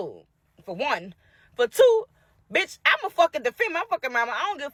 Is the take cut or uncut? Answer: uncut